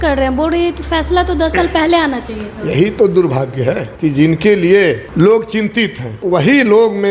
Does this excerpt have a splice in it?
yes; 3 cuts; at 3.9 s, 5.1 s, 6.2 s

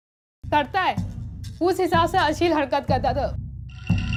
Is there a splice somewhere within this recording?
no; 0 cuts

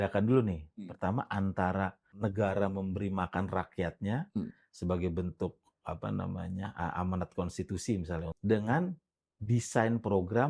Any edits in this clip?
yes; 2 cuts; at 2.1 s, 8.3 s

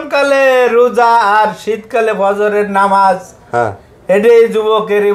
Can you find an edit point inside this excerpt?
no; 0 cuts

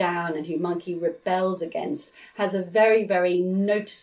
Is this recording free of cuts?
yes; 0 cuts

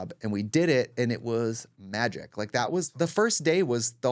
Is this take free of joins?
yes; 0 cuts

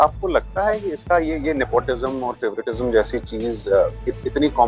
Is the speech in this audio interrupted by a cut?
no; 0 cuts

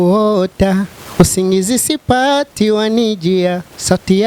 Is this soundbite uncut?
yes; 0 cuts

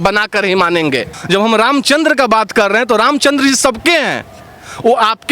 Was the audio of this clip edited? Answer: no; 0 cuts

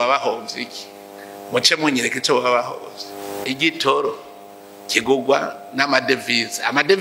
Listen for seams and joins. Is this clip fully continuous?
no; 1 cut; at 3.3 s

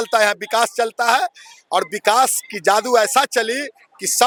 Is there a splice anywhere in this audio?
no; 0 cuts

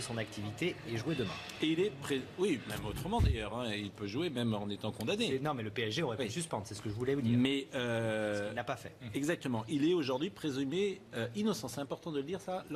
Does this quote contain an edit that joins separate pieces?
yes; 1 cut; at 8.8 s

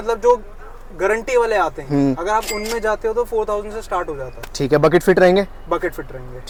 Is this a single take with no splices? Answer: yes; 0 cuts

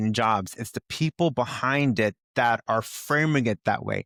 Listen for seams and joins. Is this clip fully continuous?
yes; 0 cuts

